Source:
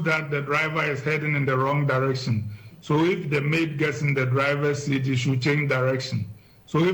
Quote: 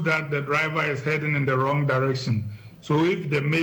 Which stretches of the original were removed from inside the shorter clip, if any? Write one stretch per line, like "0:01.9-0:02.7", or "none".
none